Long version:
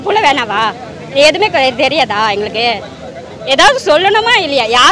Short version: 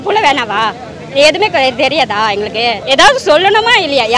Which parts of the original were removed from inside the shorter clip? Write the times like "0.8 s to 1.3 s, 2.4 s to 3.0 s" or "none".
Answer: 2.8 s to 3.4 s